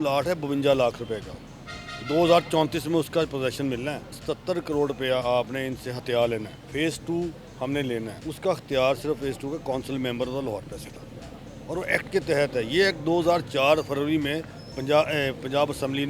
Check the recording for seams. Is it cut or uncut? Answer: cut